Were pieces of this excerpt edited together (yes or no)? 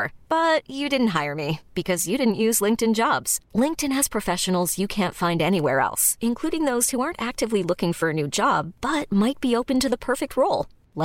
no